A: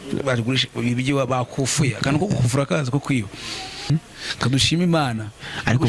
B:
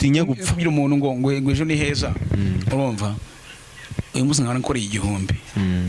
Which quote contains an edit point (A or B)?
A